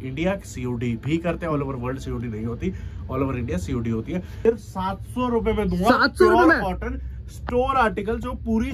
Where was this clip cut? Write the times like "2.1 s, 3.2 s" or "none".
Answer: 4.3 s